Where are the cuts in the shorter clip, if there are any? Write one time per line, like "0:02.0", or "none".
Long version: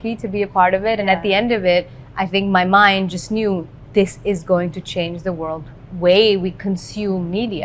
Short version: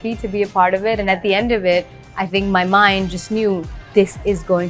none